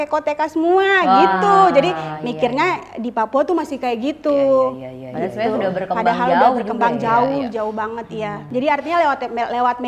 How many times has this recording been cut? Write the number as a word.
one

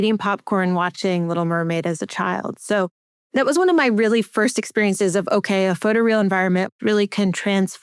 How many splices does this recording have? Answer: one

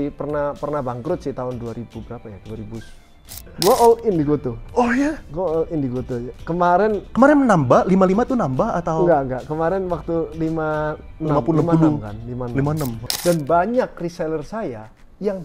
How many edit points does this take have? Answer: two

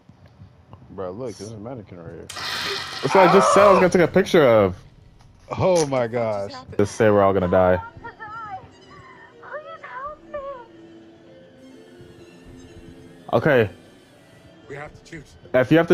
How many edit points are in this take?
one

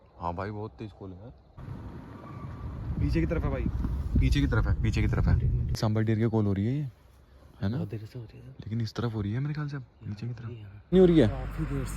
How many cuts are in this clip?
three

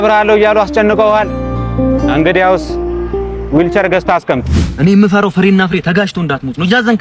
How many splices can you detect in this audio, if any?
one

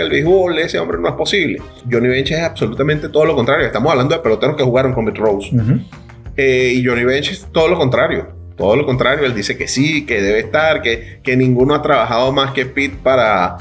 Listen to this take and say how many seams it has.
one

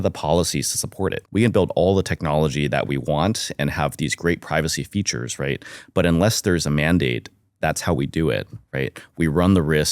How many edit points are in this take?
one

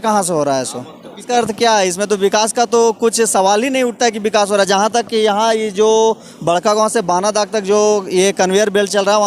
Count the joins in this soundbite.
one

